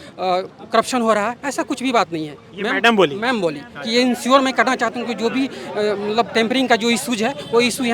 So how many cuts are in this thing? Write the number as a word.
zero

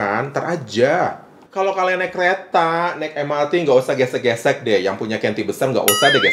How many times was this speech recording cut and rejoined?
one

